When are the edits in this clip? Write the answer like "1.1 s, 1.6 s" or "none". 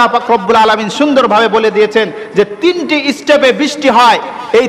none